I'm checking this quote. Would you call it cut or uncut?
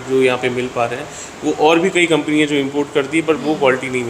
uncut